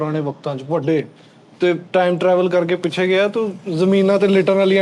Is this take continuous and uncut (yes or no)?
yes